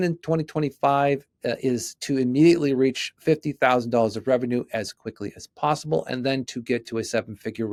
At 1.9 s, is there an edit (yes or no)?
no